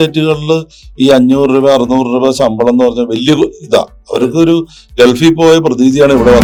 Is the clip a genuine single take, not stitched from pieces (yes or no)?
yes